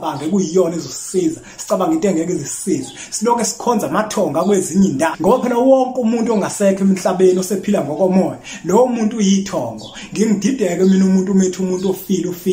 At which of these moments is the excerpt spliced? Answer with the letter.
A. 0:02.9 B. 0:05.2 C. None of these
B